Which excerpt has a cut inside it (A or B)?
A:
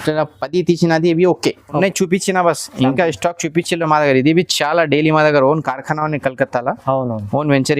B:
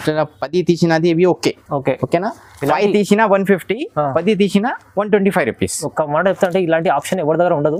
A